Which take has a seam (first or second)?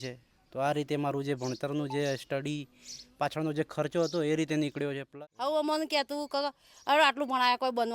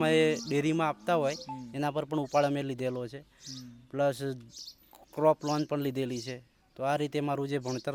first